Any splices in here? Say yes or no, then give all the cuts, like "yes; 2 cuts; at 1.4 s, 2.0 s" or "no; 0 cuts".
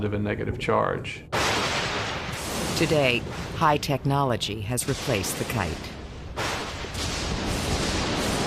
no; 0 cuts